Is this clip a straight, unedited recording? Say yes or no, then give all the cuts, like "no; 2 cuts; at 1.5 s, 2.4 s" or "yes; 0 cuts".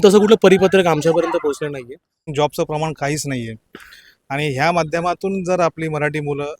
no; 1 cut; at 2.3 s